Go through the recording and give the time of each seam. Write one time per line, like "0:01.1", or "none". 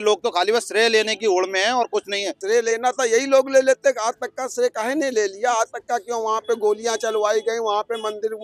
0:02.4